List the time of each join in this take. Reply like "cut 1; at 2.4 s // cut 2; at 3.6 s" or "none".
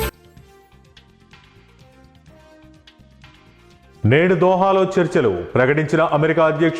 cut 1; at 2.6 s // cut 2; at 4.0 s